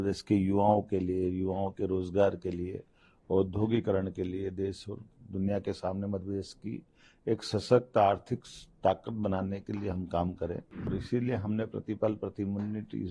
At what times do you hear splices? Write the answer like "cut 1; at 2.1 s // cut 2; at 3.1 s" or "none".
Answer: cut 1; at 10.9 s